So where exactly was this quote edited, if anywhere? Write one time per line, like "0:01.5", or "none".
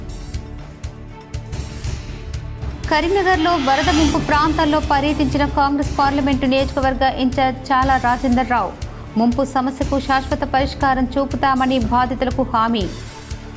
0:01.4